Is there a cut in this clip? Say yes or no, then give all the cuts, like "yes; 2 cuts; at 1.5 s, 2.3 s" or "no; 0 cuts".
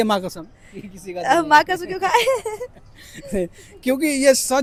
no; 0 cuts